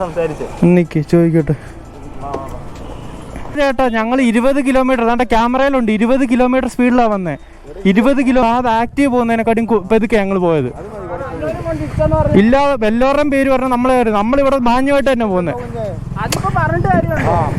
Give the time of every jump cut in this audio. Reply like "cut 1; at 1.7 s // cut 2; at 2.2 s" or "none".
cut 1; at 3.6 s // cut 2; at 8.4 s